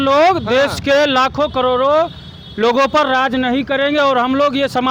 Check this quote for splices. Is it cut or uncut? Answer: uncut